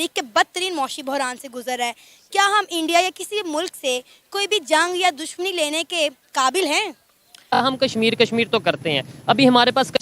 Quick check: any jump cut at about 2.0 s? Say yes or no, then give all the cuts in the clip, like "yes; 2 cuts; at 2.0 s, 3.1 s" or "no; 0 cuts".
no; 1 cut; at 7.6 s